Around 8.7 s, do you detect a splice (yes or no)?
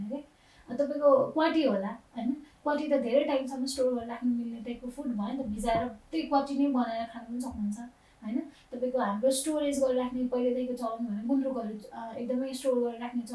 no